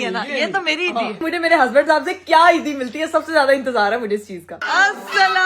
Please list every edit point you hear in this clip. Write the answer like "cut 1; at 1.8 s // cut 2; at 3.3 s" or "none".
cut 1; at 1.2 s // cut 2; at 4.4 s